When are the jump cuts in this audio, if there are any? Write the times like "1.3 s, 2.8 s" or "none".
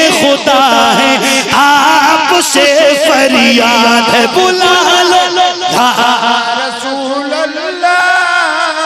none